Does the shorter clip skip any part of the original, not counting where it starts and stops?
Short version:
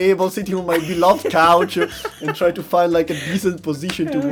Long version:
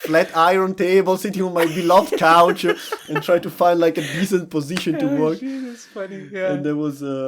no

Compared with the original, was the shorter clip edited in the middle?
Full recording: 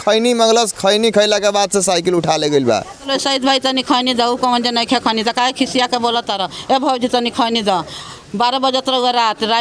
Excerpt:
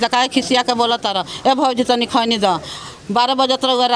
no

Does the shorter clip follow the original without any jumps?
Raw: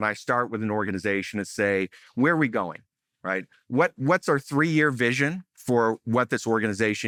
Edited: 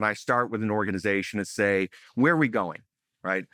yes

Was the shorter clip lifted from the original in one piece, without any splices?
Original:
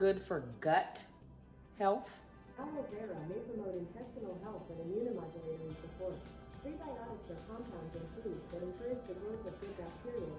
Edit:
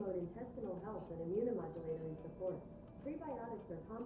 yes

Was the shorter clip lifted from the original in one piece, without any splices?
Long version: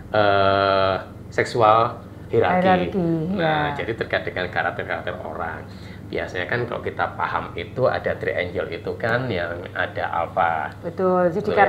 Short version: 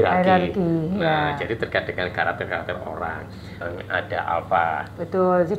no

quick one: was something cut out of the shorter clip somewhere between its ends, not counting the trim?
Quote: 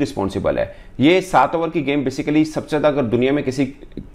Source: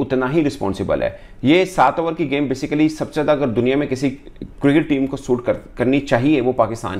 no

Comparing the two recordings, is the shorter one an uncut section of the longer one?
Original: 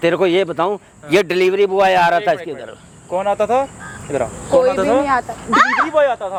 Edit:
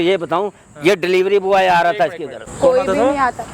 no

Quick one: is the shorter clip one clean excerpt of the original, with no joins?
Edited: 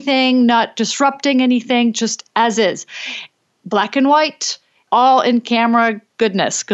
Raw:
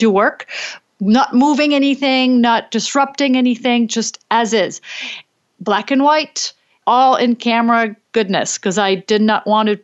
yes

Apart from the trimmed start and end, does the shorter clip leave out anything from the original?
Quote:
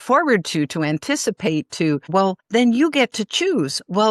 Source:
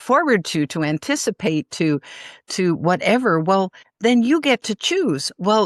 yes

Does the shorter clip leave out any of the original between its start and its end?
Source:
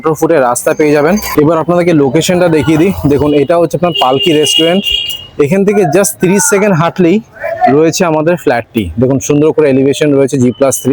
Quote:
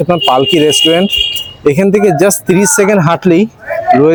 no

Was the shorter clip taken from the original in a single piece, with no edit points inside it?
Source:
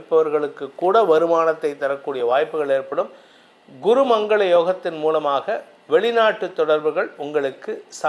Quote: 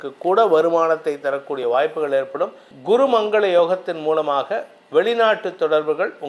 no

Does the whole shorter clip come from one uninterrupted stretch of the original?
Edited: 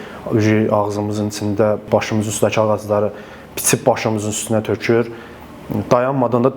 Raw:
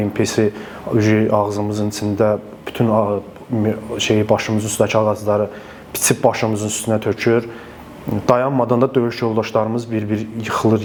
no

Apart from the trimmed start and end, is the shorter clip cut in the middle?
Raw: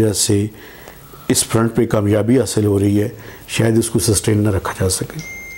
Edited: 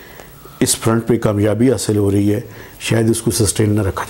no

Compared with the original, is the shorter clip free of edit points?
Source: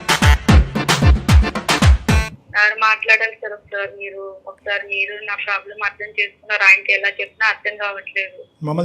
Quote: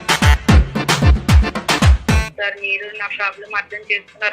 no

